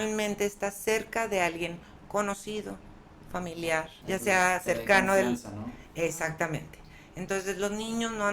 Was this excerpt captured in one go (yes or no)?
no